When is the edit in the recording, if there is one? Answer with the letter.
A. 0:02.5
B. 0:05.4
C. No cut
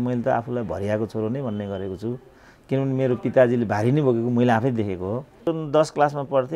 B